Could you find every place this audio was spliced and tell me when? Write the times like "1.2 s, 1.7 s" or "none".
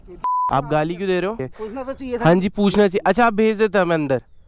1.5 s